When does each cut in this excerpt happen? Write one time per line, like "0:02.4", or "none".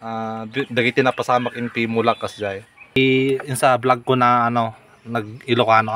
0:03.0